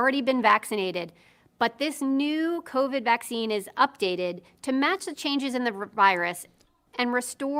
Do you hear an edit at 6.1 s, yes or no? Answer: no